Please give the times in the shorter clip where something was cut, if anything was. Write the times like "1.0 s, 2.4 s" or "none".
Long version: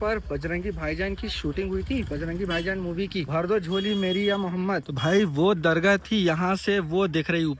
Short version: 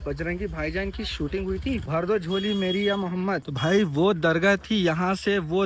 1.8 s